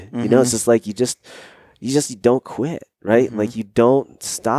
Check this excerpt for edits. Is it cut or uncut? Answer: uncut